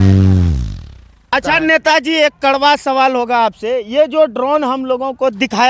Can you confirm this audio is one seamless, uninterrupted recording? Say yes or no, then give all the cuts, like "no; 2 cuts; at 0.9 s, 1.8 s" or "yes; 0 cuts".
no; 1 cut; at 1.3 s